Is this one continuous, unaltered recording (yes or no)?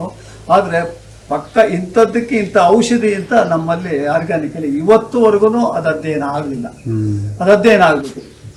yes